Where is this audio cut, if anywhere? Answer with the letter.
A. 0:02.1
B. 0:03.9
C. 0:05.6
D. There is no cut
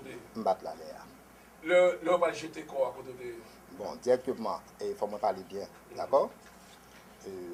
D